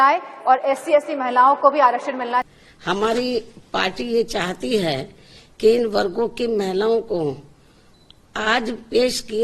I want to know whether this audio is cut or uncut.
cut